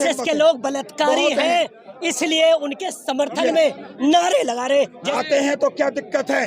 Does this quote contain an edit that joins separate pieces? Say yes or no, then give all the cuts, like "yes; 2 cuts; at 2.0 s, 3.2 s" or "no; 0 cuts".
yes; 1 cut; at 5.0 s